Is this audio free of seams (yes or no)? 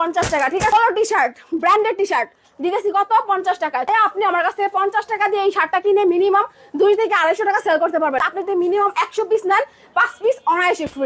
no